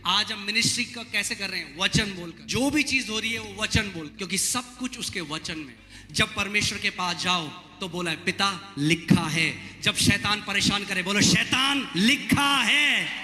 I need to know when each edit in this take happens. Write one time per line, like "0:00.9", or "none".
0:02.4
0:04.1
0:05.8

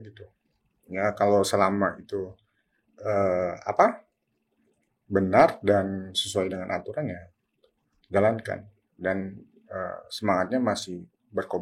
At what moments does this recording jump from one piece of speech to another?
none

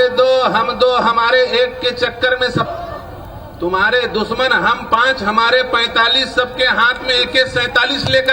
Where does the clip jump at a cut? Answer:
0:02.7

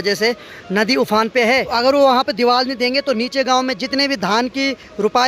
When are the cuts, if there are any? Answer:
0:01.7

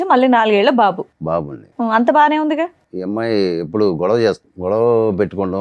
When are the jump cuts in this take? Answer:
0:02.9
0:04.5

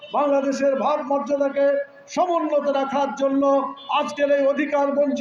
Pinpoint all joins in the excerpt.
none

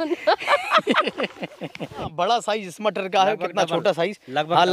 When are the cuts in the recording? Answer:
0:02.0

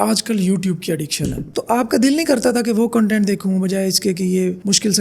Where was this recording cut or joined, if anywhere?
0:01.5

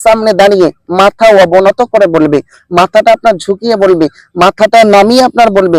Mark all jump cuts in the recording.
none

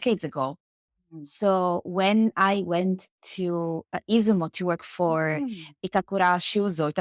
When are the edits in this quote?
none

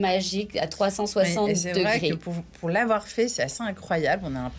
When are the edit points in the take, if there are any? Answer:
none

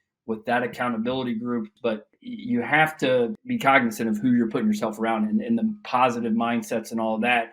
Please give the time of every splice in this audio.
0:01.7
0:03.4

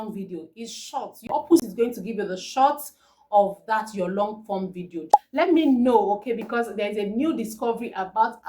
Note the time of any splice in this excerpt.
0:01.3
0:05.1

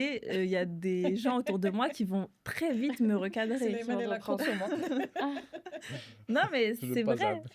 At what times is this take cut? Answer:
none

